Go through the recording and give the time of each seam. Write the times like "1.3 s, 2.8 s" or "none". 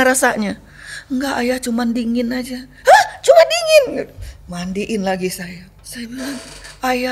5.8 s